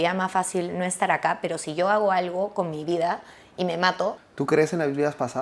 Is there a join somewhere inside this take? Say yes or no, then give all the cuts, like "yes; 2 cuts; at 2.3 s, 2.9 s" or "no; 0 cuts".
yes; 1 cut; at 4.2 s